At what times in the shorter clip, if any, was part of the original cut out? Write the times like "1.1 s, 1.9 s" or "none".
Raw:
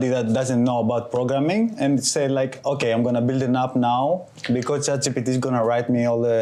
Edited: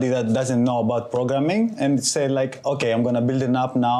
none